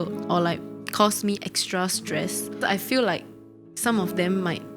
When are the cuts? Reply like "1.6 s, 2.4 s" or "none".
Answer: 2.6 s